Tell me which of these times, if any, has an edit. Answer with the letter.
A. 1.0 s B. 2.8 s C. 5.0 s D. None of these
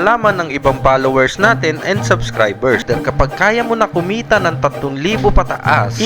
B